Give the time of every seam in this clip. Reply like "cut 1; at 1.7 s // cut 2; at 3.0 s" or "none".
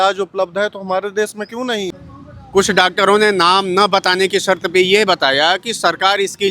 cut 1; at 2.0 s